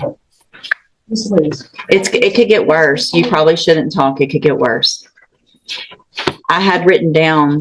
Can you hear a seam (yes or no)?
no